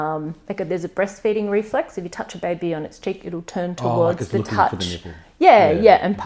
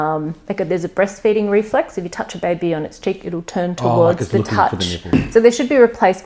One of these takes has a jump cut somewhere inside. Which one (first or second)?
second